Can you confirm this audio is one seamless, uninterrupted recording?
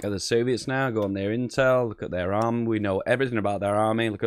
yes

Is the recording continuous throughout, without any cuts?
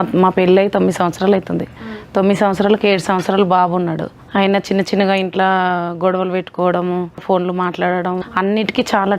no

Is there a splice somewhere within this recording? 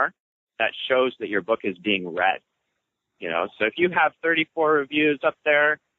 no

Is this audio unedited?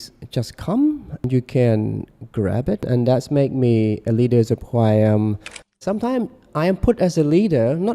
no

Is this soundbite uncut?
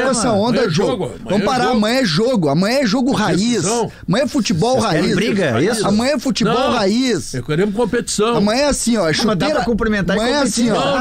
yes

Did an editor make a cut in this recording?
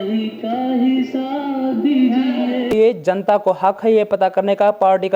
yes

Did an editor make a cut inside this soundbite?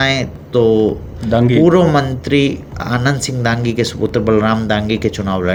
no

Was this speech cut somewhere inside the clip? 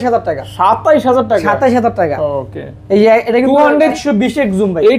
yes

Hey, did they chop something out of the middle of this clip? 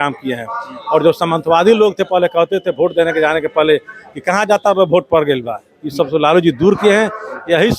no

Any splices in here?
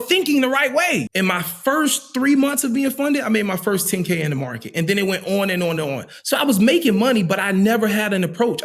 yes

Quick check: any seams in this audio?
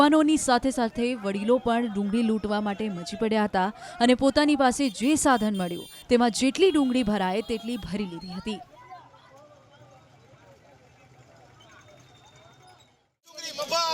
yes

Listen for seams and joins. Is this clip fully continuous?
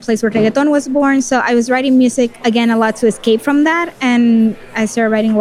yes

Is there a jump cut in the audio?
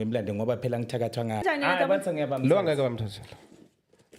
yes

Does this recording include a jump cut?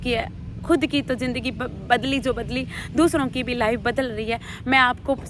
no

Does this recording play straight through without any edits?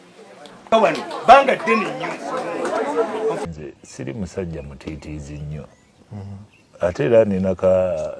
no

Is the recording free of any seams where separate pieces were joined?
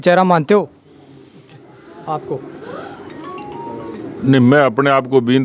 yes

